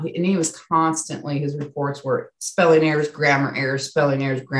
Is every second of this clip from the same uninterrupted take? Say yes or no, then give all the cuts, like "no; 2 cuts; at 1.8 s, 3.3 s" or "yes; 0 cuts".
yes; 0 cuts